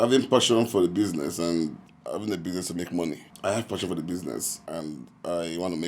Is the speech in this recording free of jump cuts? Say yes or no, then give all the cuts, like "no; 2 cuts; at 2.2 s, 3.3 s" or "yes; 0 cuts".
no; 2 cuts; at 3.3 s, 4.6 s